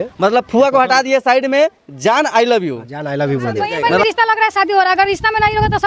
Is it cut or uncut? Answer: cut